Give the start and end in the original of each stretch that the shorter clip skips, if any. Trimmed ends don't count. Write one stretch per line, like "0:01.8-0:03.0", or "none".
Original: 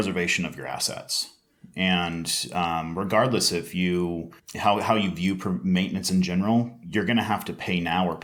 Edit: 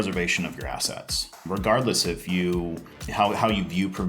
0:01.4-0:02.9